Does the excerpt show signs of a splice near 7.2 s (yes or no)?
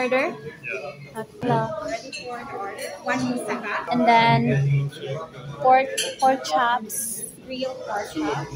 no